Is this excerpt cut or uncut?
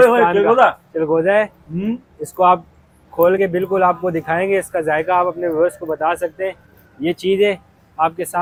uncut